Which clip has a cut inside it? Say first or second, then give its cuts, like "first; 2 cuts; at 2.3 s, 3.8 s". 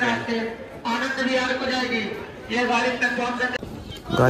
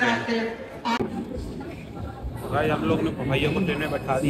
second; 1 cut; at 1.0 s